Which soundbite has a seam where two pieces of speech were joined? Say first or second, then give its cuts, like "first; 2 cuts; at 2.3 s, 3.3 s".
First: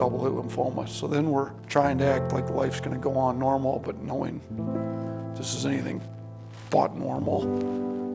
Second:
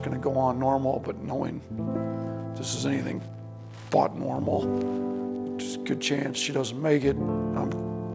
first; 1 cut; at 1.6 s